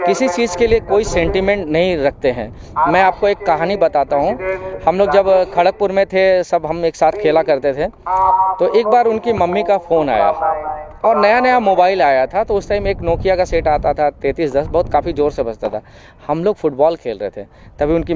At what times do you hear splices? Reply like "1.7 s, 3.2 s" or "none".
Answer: none